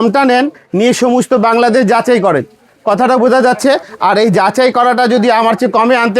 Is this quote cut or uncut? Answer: uncut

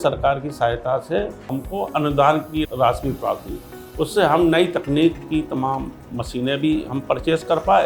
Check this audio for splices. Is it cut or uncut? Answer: cut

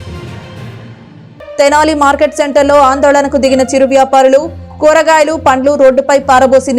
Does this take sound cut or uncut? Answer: cut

